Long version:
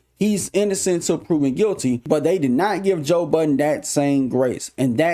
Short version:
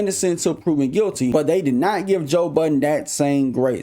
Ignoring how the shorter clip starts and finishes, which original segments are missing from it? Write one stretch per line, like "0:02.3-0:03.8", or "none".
0:01.9-0:02.1